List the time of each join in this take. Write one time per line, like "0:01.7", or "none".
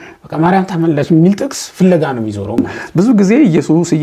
0:02.6